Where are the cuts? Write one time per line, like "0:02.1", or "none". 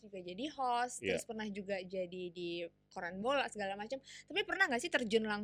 none